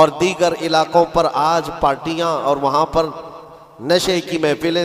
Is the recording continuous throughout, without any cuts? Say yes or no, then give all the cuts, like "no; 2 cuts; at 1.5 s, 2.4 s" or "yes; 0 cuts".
yes; 0 cuts